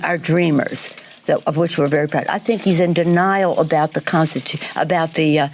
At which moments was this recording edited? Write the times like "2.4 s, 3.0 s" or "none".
2.3 s, 3.5 s

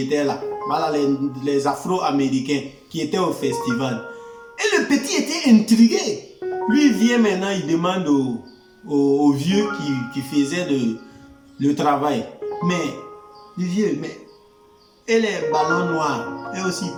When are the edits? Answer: none

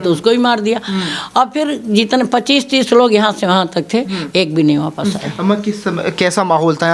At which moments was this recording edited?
none

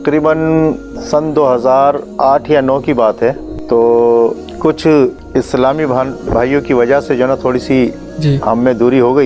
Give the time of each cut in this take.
0.9 s, 2.1 s, 3.5 s, 4.5 s, 5.2 s

